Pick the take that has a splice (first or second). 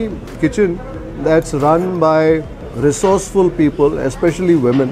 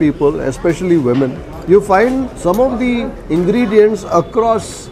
second